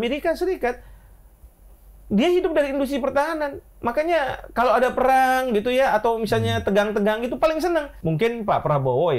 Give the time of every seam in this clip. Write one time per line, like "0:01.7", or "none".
0:07.9